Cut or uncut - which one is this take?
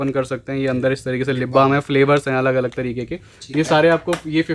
uncut